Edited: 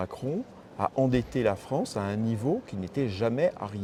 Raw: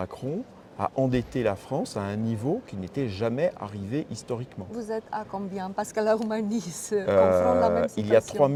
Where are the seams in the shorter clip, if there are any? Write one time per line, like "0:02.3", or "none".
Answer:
none